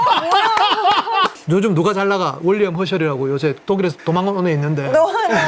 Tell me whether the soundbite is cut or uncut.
cut